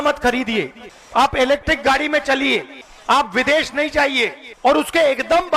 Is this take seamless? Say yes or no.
yes